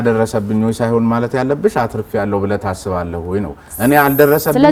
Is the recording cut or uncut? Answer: uncut